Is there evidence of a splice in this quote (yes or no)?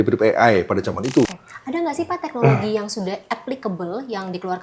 yes